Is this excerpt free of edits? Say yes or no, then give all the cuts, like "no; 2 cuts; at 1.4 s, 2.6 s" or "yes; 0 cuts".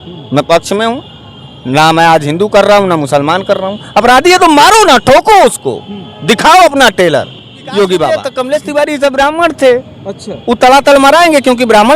no; 1 cut; at 8.1 s